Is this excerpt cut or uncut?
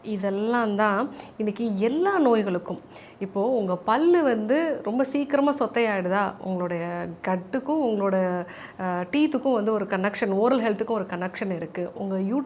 uncut